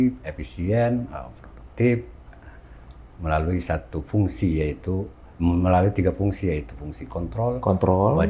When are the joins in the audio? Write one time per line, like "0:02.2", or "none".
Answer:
none